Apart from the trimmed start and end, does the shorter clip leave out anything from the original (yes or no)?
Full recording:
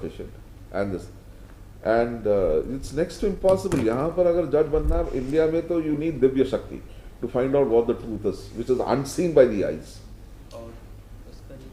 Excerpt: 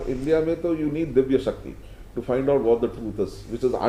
no